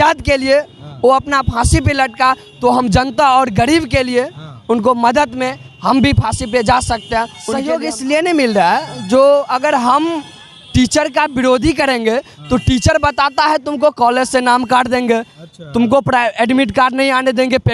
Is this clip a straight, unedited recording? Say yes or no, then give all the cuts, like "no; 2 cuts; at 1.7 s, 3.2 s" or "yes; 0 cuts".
no; 1 cut; at 7.4 s